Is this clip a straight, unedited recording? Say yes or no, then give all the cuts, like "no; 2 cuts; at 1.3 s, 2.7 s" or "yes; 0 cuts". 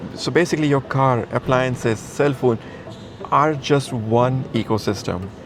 yes; 0 cuts